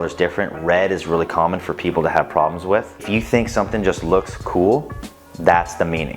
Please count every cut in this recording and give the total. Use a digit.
1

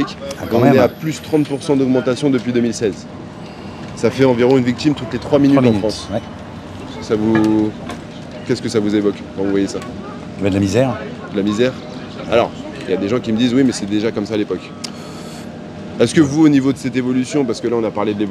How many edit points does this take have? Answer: 0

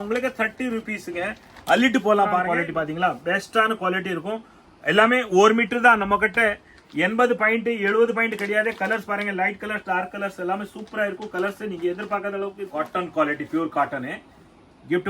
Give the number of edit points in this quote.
2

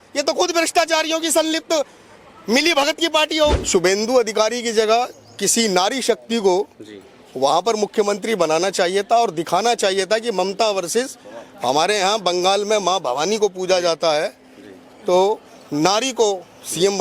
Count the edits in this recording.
1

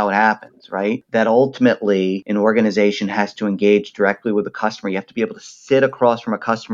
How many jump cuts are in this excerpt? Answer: 2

